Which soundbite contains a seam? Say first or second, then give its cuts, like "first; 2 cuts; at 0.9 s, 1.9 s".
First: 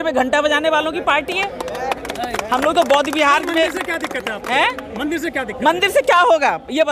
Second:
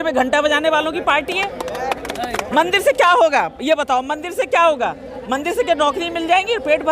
second; 1 cut; at 2.4 s